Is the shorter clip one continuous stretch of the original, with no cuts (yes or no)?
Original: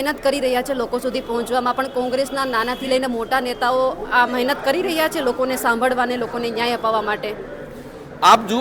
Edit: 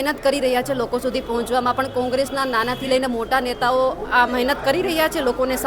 yes